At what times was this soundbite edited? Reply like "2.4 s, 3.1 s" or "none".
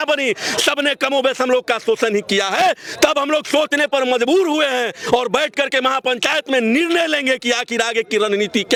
none